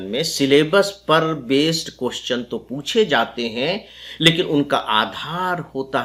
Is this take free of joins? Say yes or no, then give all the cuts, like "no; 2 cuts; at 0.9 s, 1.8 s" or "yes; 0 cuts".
yes; 0 cuts